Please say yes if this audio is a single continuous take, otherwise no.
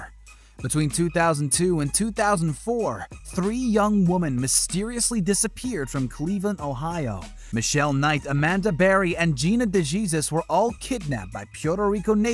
no